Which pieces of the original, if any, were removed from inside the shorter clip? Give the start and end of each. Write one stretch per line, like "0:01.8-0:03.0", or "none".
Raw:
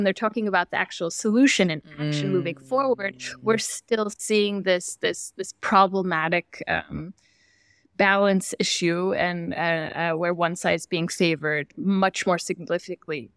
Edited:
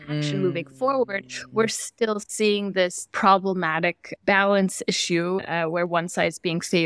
0:04.9-0:05.5
0:06.6-0:07.8
0:09.1-0:09.9